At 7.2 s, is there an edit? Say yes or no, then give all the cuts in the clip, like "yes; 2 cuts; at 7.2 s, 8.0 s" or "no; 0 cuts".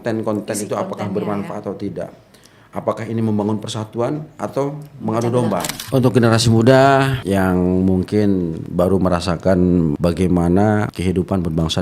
yes; 5 cuts; at 5.8 s, 7.2 s, 8.6 s, 10.0 s, 10.9 s